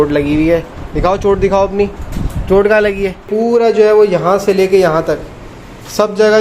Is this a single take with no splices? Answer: no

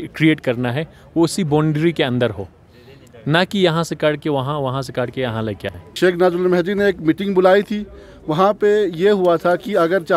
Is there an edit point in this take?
yes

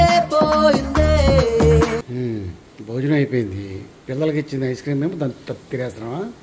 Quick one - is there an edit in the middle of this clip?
yes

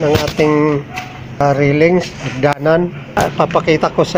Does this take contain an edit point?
yes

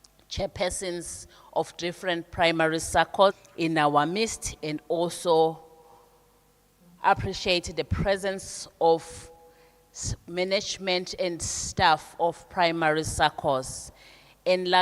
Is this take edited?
yes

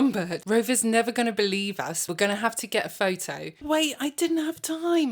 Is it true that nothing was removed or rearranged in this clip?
no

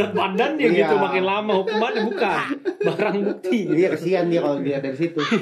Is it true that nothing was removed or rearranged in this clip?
yes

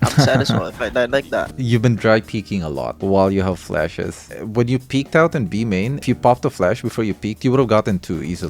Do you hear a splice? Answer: yes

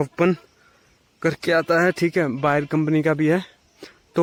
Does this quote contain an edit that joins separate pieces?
no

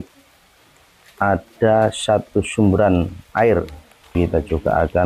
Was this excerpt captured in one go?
no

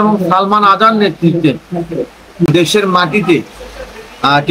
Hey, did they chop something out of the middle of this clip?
yes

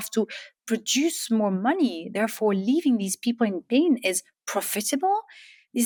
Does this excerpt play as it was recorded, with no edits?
yes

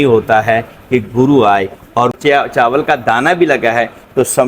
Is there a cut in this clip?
yes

